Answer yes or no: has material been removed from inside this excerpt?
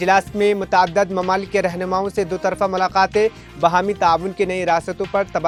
no